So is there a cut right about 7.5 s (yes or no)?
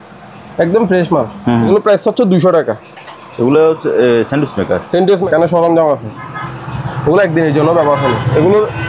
no